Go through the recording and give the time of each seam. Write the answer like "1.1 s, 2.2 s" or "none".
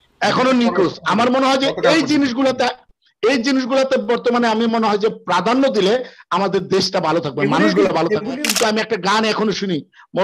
8.3 s